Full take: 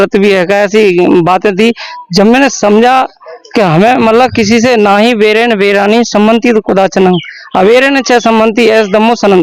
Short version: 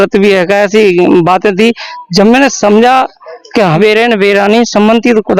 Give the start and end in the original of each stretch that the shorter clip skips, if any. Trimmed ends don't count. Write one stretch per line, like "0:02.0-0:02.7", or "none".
0:03.8-0:05.2